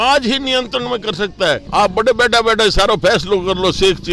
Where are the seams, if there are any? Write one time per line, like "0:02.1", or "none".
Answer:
0:01.7